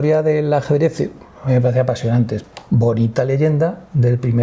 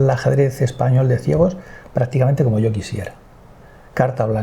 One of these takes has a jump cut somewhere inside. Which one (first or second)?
first